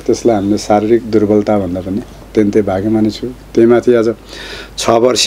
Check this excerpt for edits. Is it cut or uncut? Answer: cut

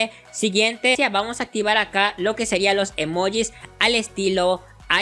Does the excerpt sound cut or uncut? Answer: cut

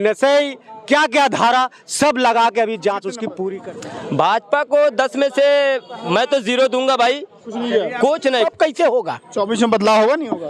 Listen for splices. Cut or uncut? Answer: cut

